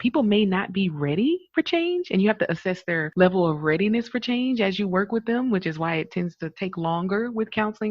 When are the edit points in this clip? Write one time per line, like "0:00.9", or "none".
0:03.1

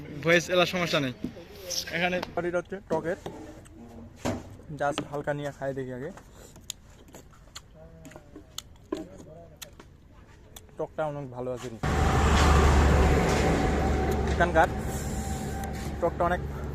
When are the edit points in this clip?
0:02.4
0:11.8

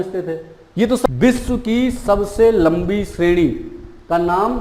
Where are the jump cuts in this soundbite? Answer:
0:01.1

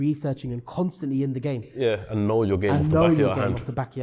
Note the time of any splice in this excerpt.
none

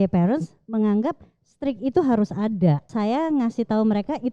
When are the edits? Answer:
0:02.9

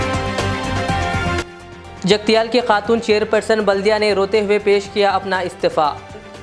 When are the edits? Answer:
0:01.6

